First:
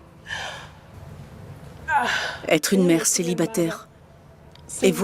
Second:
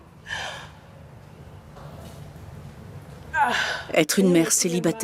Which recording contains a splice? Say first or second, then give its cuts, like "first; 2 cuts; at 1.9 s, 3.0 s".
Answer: first; 1 cut; at 0.9 s